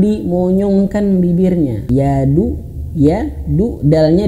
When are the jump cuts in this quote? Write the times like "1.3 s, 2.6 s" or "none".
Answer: 1.8 s